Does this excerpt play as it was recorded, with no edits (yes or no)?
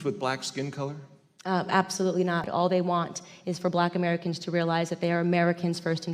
no